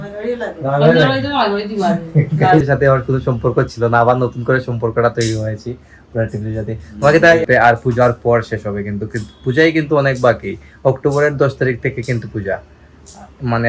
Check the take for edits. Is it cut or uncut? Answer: cut